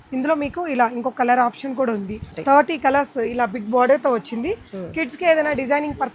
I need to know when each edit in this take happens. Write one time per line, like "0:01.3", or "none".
0:02.2